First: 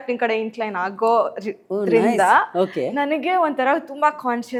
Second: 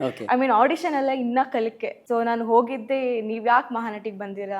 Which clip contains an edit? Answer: second; 1 cut; at 2.0 s

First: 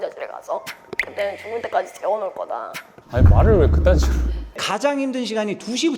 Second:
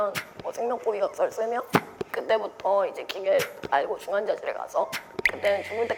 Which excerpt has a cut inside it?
first; 2 cuts; at 3.0 s, 4.4 s

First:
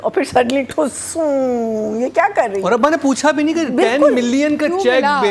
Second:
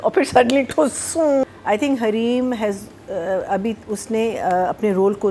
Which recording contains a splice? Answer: second; 1 cut; at 1.4 s

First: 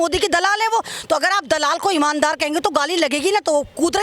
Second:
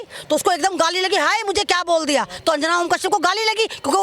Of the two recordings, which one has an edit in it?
second; 1 cut; at 2.3 s

